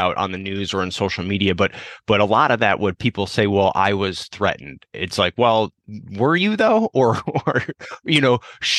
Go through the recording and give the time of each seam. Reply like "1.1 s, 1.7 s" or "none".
5.8 s